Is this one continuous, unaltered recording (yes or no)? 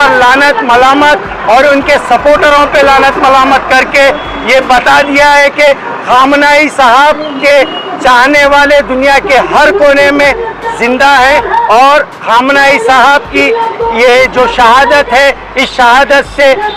yes